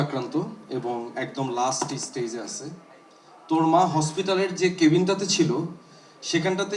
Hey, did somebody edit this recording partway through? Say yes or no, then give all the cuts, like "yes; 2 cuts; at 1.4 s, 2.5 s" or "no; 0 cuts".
no; 0 cuts